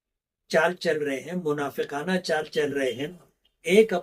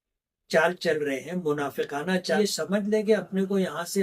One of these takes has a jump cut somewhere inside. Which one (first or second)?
second